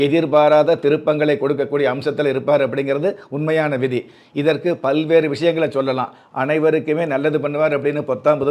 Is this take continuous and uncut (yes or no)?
yes